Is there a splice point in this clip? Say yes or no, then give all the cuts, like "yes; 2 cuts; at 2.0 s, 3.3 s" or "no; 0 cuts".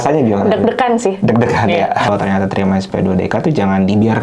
yes; 1 cut; at 2.1 s